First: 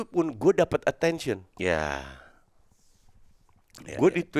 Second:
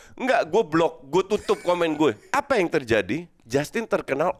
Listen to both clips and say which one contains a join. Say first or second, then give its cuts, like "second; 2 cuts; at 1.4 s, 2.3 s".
second; 1 cut; at 2.2 s